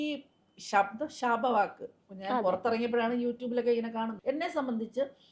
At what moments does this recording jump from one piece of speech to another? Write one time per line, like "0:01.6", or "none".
none

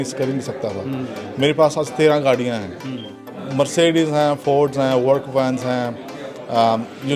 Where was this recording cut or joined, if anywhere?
0:03.4

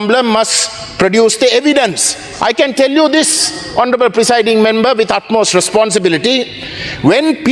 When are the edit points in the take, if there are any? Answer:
none

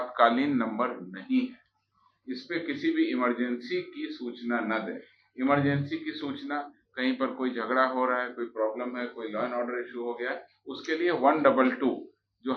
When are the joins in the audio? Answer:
none

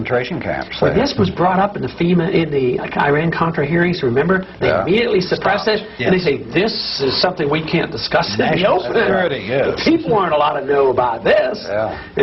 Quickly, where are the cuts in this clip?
none

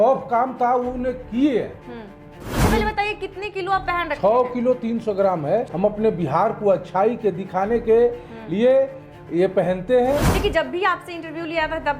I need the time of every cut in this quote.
0:02.6
0:05.7
0:10.3

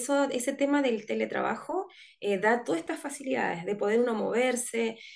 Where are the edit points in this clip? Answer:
none

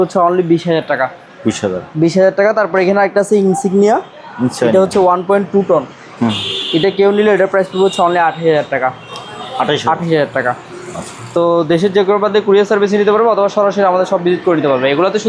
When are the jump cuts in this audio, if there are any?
none

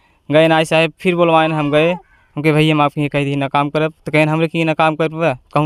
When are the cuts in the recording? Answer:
none

